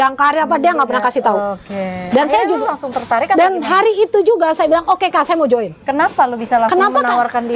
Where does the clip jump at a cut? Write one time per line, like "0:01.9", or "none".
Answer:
none